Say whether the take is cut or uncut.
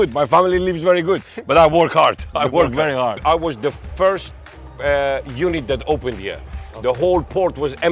cut